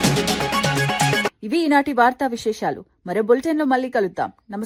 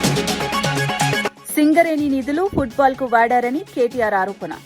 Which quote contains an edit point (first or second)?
second